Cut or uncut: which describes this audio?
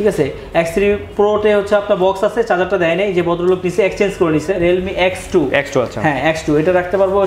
cut